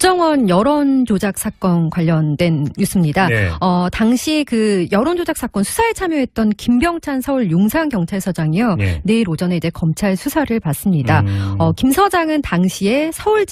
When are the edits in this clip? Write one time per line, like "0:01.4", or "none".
none